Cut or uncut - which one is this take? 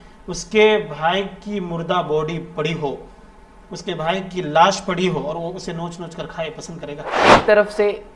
cut